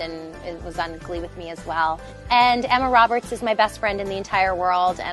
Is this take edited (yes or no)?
yes